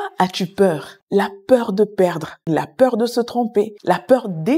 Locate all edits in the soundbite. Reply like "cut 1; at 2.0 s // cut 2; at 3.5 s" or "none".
cut 1; at 1.0 s